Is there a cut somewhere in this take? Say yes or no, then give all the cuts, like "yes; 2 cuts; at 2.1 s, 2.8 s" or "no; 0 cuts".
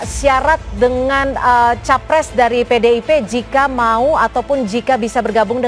no; 0 cuts